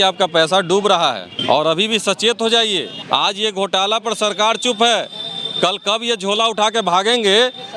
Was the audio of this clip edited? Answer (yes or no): yes